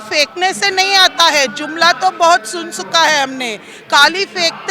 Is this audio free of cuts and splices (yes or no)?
yes